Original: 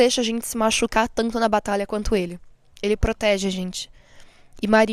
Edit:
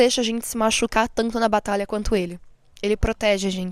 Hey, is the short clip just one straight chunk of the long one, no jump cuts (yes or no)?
yes